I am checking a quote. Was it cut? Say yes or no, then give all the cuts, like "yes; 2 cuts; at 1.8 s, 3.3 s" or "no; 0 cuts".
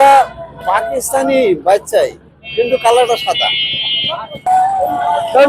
yes; 1 cut; at 4.4 s